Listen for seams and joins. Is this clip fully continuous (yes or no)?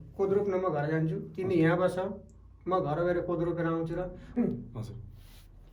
no